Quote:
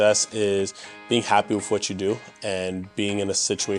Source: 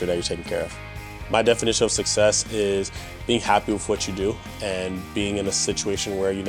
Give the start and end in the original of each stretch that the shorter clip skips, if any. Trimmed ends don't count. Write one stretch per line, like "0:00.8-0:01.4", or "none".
none